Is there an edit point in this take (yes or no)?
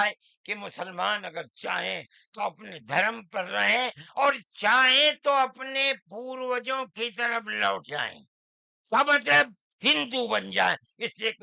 no